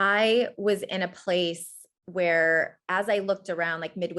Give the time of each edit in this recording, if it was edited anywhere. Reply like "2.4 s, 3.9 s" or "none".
none